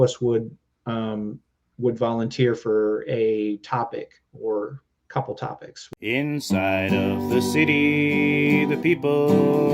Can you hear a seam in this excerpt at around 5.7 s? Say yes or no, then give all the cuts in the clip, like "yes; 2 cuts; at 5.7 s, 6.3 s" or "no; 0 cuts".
yes; 1 cut; at 5.7 s